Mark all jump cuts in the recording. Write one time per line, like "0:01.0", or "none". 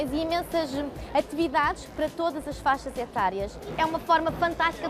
0:03.7